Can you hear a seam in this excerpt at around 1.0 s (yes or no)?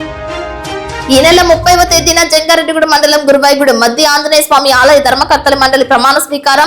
yes